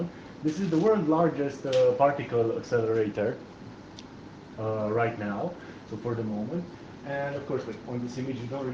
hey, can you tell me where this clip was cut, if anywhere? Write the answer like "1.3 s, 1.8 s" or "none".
2.2 s